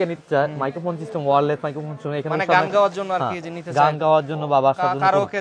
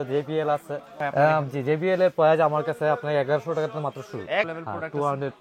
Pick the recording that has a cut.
second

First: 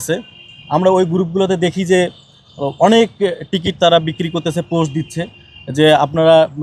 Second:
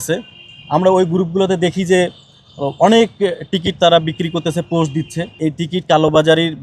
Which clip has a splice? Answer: second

